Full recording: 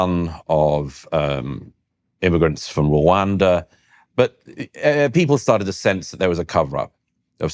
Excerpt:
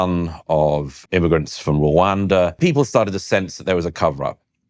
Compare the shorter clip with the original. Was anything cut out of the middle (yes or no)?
yes